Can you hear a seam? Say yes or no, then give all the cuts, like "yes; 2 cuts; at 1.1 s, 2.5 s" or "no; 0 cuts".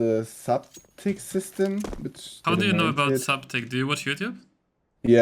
yes; 1 cut; at 2.3 s